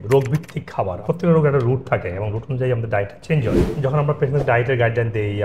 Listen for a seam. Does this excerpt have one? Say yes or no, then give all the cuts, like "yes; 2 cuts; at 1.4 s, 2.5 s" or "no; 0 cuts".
yes; 2 cuts; at 1.0 s, 3.7 s